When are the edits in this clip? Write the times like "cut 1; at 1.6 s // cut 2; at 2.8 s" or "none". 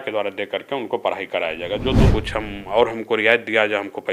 cut 1; at 2.1 s